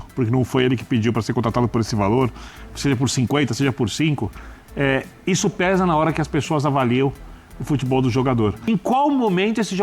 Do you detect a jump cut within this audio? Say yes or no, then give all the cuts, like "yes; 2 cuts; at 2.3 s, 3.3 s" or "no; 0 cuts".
yes; 1 cut; at 8.7 s